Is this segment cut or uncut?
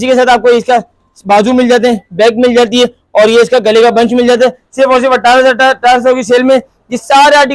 uncut